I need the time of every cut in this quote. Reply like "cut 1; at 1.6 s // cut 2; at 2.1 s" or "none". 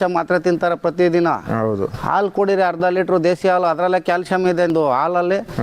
cut 1; at 4.7 s